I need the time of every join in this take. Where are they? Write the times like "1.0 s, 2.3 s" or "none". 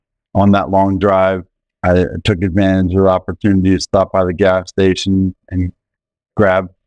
none